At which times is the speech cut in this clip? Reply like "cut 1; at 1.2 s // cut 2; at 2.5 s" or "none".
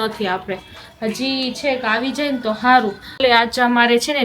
cut 1; at 3.2 s